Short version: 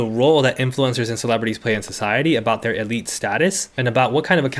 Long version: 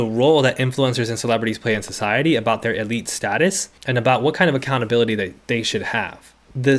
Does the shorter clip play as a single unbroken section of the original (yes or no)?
no